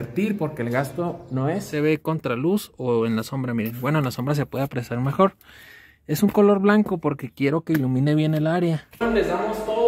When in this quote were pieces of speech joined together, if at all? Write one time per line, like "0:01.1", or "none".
0:01.7
0:09.0